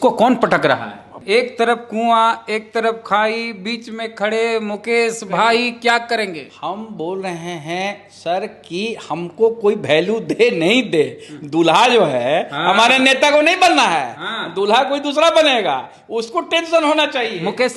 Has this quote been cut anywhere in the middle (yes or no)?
yes